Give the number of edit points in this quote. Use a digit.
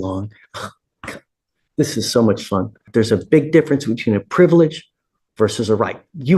1